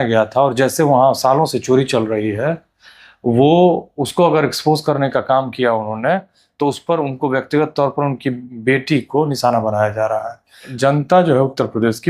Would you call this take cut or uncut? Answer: cut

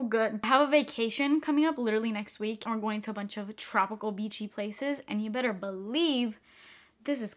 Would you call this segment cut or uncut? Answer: uncut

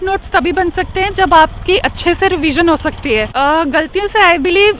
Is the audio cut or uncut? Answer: cut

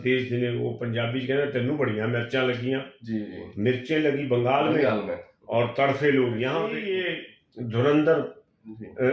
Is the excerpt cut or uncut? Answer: cut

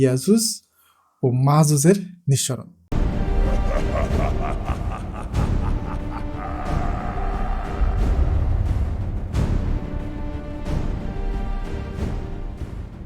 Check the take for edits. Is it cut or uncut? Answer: cut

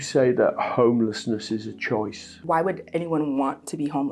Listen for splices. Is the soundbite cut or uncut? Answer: cut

